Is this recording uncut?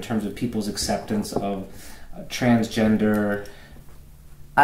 yes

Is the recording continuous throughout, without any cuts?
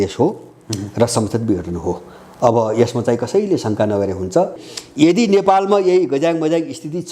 no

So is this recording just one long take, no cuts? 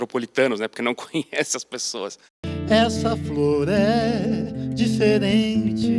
no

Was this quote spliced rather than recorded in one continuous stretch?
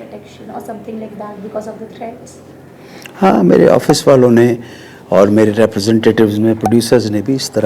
no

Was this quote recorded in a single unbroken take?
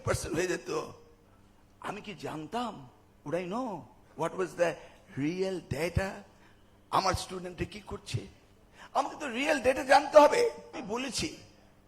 no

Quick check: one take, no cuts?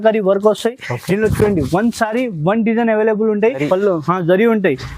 no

